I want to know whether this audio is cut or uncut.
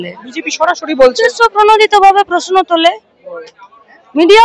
uncut